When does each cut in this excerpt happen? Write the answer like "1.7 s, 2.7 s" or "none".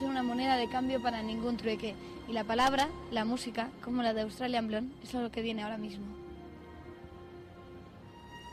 2.4 s